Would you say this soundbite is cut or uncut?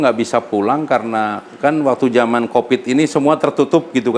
uncut